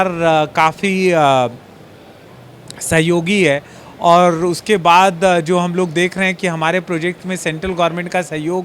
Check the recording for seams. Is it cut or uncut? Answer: uncut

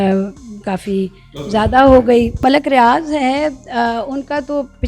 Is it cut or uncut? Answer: cut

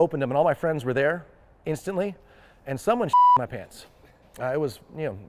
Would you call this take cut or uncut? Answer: uncut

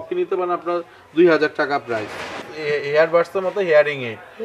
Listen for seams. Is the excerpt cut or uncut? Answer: cut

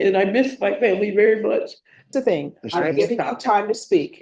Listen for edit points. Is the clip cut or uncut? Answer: cut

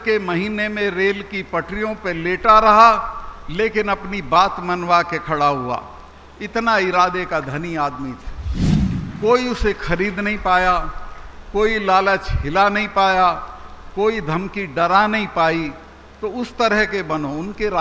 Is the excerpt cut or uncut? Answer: uncut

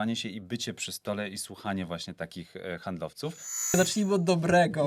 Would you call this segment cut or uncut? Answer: cut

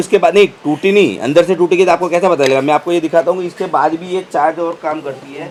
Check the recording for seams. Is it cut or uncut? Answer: uncut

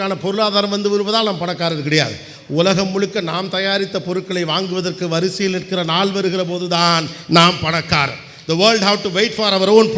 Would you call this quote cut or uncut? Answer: uncut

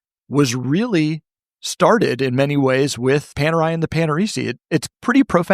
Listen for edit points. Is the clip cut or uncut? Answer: cut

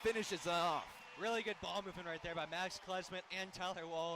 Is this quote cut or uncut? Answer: uncut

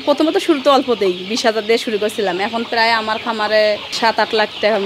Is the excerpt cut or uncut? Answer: cut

